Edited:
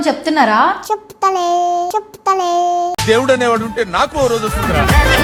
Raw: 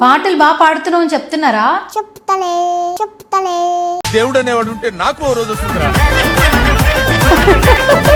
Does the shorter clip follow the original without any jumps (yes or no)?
yes